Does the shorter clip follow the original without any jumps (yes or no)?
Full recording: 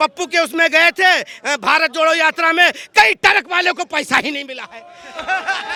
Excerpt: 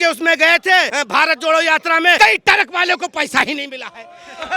no